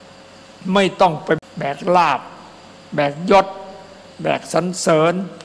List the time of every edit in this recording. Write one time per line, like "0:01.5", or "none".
0:01.4